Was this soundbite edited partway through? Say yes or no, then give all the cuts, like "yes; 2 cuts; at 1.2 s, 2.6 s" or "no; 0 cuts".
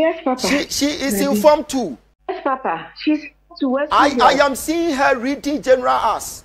yes; 1 cut; at 2.1 s